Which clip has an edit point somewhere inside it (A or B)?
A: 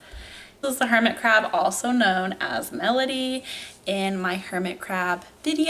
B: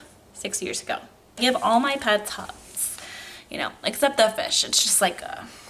B